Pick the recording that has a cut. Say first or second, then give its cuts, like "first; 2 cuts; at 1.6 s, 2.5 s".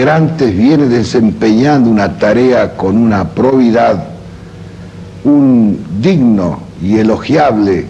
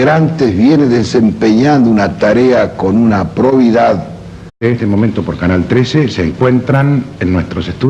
first; 1 cut; at 4.6 s